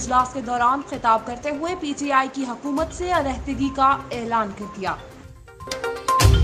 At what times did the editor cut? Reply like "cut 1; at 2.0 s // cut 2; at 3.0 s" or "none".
cut 1; at 5.3 s